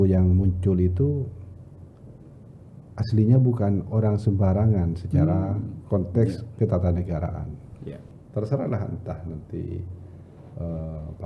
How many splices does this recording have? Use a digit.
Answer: 1